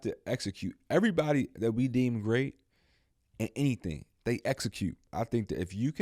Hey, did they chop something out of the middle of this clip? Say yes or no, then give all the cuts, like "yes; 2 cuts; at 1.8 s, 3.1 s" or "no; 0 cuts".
yes; 2 cuts; at 4.1 s, 5.0 s